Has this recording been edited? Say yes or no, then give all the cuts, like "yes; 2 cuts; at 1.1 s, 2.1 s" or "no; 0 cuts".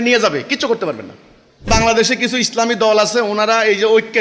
yes; 1 cut; at 1.7 s